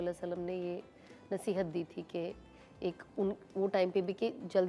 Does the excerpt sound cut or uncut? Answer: uncut